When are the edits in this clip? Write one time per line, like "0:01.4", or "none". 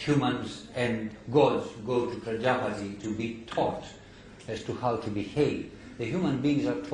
0:04.0

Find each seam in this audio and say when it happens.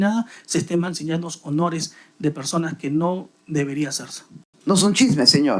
0:04.5

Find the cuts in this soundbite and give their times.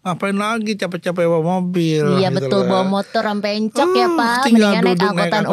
none

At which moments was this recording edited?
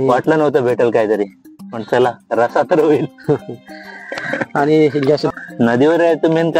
0:05.3

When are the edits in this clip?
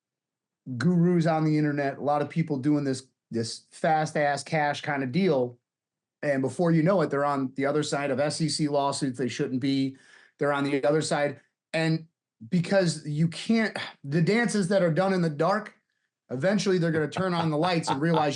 none

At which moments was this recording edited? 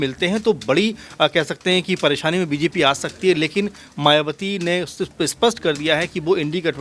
none

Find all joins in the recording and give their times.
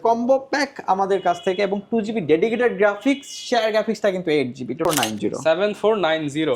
0:04.8

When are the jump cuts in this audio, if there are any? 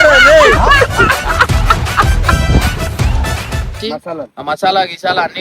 0:03.7

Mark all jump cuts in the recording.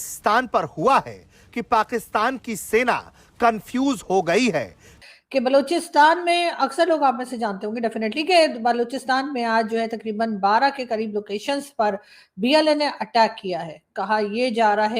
0:04.9

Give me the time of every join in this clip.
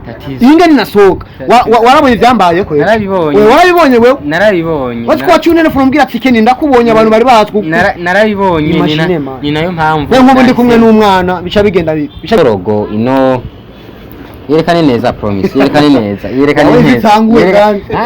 0:12.4

